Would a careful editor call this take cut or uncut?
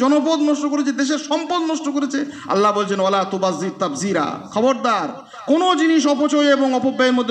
uncut